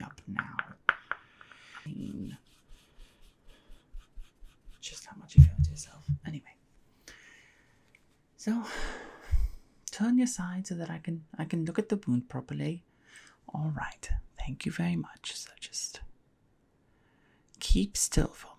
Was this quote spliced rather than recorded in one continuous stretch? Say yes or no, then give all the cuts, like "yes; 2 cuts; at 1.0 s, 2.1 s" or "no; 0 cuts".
yes; 1 cut; at 1.8 s